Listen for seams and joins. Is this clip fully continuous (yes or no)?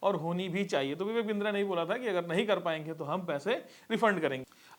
yes